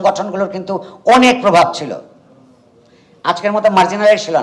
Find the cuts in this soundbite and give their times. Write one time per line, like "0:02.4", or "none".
none